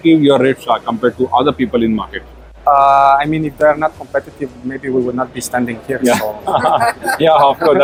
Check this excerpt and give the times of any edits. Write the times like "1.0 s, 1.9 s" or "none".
none